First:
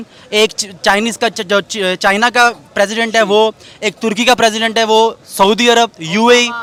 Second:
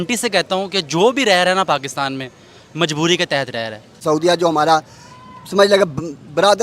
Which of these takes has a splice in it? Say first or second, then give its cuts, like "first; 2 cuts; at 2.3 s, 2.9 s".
second; 1 cut; at 4.0 s